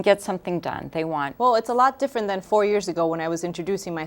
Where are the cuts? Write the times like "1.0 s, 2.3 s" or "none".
1.2 s, 2.4 s